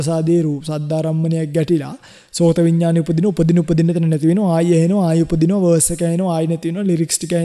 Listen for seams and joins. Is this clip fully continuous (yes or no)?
yes